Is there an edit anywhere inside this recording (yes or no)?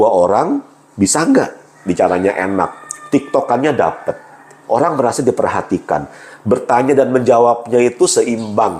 no